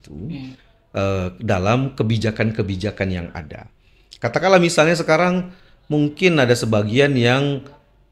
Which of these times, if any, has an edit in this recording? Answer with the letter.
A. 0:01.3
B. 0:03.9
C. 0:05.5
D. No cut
D